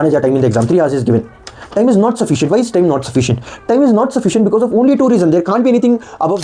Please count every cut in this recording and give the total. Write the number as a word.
zero